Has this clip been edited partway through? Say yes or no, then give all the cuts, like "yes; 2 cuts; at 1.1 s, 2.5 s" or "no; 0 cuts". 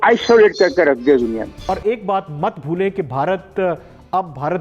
yes; 1 cut; at 1.6 s